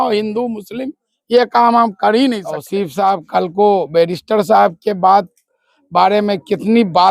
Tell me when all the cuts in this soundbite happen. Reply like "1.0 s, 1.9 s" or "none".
2.6 s